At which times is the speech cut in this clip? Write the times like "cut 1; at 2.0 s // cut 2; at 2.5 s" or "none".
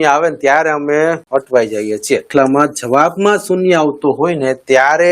cut 1; at 1.2 s // cut 2; at 2.3 s